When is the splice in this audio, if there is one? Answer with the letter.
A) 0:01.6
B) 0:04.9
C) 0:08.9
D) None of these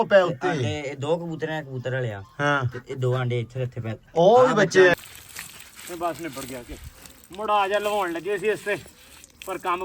B